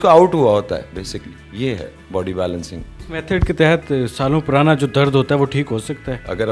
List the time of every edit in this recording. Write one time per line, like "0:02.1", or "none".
none